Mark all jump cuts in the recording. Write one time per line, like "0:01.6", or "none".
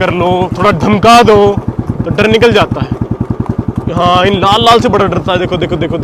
none